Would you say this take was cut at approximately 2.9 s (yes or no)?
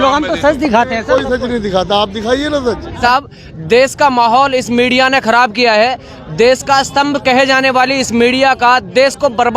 yes